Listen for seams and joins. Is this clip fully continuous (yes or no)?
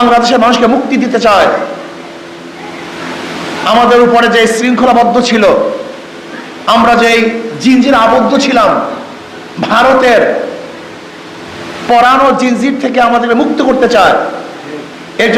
yes